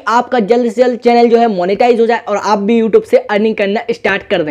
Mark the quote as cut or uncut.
uncut